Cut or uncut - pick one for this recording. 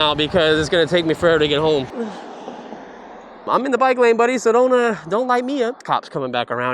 cut